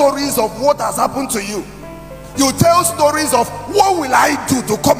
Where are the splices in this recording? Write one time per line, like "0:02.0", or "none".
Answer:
none